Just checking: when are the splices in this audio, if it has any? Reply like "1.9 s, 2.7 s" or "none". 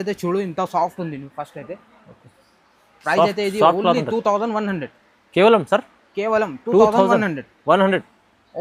none